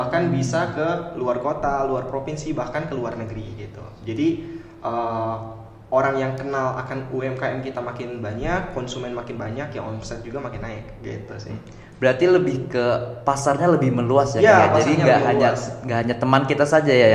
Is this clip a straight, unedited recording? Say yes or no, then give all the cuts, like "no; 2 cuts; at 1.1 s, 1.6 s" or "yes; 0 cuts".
yes; 0 cuts